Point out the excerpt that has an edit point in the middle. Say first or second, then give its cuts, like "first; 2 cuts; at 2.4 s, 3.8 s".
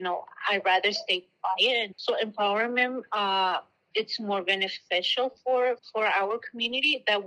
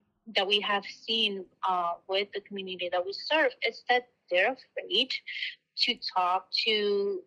first; 3 cuts; at 1.9 s, 3.8 s, 5.8 s